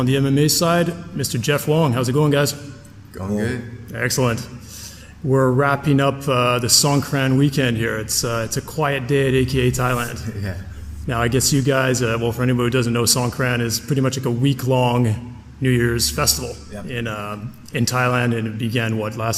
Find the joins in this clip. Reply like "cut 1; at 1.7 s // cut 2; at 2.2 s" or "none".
cut 1; at 1.9 s